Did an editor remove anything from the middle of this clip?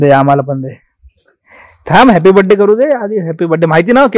no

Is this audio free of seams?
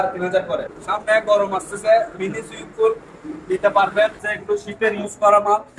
no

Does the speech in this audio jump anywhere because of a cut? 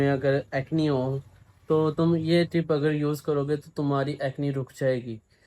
no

